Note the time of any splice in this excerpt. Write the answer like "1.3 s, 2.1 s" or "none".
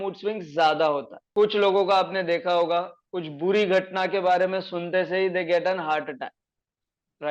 1.2 s